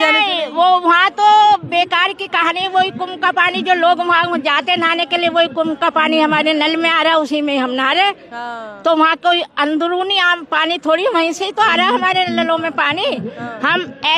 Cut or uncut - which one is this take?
uncut